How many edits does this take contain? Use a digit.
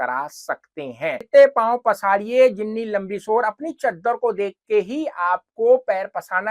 1